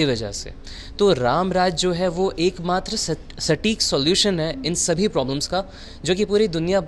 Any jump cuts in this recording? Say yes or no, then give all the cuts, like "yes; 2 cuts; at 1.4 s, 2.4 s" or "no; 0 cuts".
no; 0 cuts